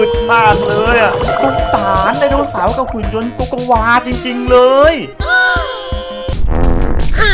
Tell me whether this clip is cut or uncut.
cut